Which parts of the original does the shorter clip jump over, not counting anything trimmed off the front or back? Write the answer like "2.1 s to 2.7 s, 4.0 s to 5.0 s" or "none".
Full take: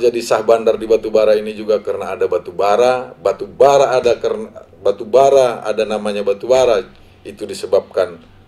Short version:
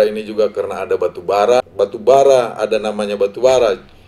3.0 s to 4.8 s